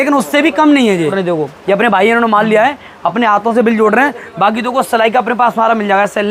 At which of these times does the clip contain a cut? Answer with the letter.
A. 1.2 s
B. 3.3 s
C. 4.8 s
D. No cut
A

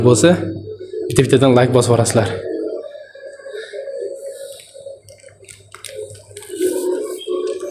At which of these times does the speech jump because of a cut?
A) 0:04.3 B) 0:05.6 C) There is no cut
C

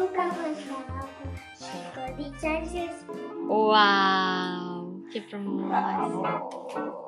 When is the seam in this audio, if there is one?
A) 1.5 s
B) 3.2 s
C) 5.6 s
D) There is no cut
B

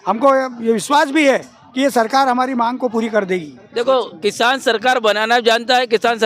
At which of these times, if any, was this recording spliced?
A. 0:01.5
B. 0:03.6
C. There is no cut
B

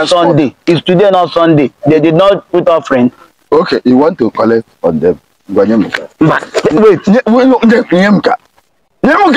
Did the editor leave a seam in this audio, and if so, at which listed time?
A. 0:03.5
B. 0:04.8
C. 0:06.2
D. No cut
A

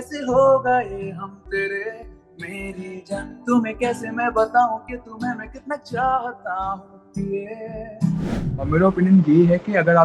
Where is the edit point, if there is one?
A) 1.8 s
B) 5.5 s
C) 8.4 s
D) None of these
C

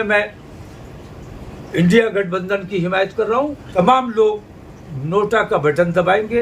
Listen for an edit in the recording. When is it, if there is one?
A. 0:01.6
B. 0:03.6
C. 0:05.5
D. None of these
B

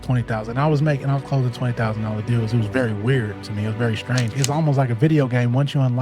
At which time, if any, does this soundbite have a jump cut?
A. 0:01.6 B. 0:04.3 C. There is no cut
B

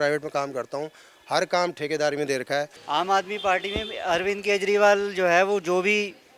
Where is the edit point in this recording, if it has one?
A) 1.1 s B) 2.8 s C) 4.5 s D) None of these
B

